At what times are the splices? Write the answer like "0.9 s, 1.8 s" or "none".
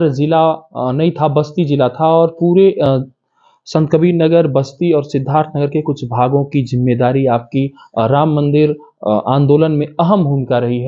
none